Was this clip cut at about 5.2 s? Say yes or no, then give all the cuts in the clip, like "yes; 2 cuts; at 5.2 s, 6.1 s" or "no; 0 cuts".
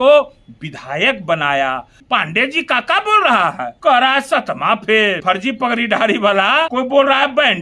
yes; 4 cuts; at 2.0 s, 3.7 s, 5.2 s, 6.7 s